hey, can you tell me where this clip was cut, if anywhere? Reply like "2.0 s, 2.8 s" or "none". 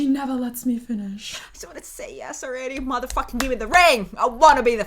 1.3 s